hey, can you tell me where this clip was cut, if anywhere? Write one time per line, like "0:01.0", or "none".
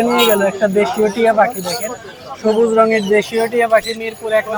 none